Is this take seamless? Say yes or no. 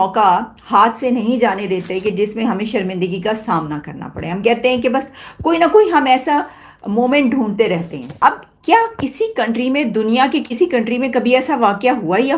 no